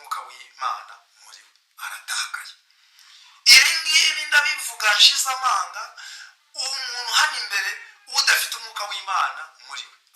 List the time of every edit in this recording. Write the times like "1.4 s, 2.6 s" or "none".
none